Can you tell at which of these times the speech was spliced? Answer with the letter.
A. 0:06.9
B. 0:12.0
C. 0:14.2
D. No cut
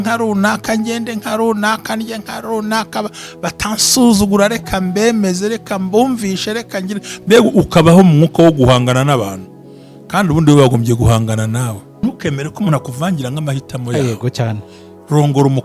B